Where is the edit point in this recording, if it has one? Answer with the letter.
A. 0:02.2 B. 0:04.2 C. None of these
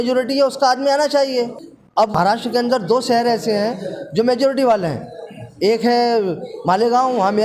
A